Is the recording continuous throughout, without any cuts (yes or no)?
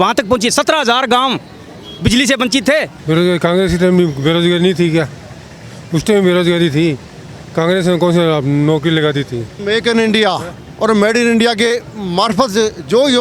no